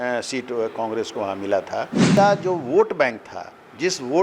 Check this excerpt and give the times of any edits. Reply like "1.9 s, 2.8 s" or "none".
2.0 s

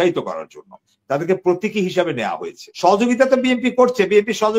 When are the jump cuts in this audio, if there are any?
2.6 s

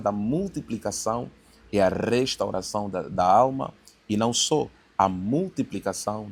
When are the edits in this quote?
none

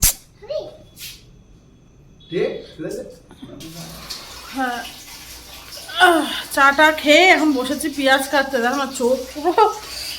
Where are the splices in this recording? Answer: 3.7 s

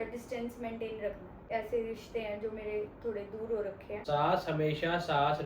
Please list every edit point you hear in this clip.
1.5 s, 3.9 s

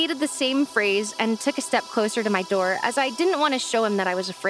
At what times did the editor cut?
none

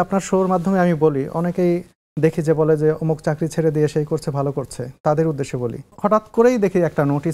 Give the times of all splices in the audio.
5.9 s

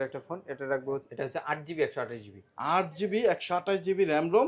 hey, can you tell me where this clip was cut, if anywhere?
1.1 s

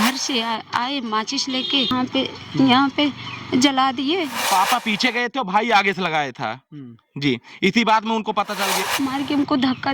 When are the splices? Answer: 1.9 s, 4.4 s, 8.7 s

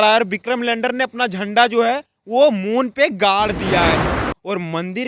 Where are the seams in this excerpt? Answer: 4.1 s

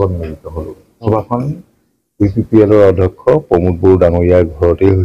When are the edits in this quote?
1.1 s

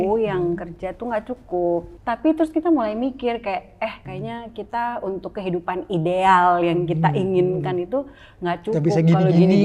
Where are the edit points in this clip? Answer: 1.9 s, 4.1 s

